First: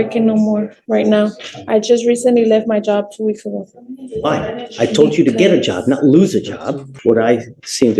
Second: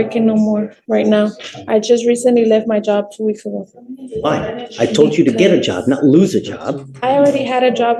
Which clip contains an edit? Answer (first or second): first